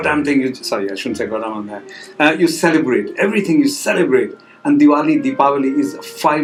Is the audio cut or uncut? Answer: uncut